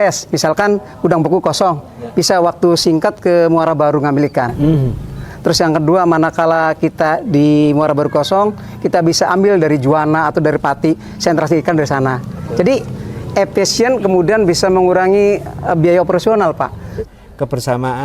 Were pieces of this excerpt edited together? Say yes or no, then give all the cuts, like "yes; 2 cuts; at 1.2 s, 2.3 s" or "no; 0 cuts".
yes; 1 cut; at 17.0 s